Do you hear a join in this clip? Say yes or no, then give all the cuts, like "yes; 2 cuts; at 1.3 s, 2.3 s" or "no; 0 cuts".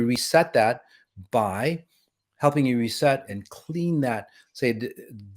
yes; 1 cut; at 3.2 s